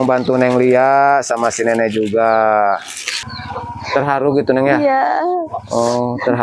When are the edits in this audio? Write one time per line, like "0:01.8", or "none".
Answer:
0:03.3